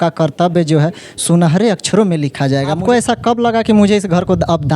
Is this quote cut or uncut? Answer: cut